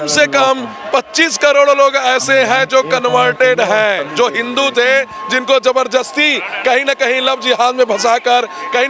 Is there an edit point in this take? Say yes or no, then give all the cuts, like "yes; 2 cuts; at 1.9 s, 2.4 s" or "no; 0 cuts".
no; 0 cuts